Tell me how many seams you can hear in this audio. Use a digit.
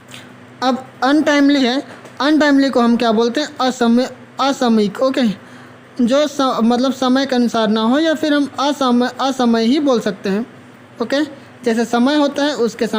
0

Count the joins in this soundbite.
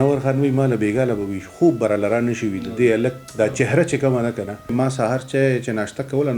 1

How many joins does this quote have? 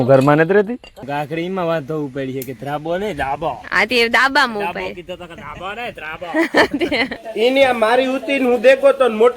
2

